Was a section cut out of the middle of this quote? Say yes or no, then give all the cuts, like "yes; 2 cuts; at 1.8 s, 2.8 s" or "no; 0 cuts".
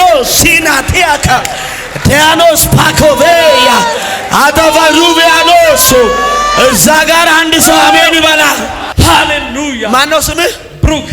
yes; 1 cut; at 8.8 s